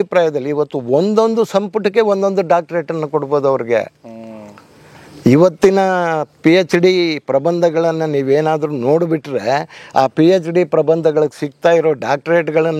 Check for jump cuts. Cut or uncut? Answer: uncut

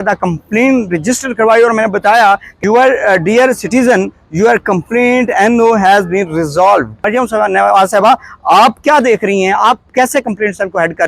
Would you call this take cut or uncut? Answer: cut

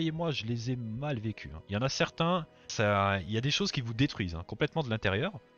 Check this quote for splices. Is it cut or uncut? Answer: uncut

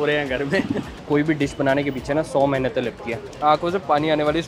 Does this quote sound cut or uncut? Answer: cut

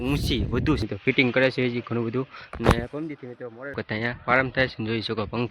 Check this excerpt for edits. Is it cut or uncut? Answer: cut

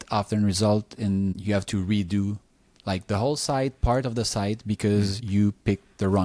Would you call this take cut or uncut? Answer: uncut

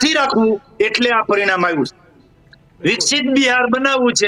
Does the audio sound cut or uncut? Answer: uncut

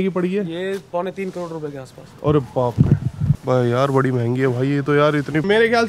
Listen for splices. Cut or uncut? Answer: uncut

